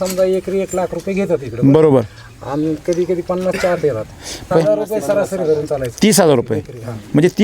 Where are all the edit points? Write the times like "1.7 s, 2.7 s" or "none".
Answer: 4.5 s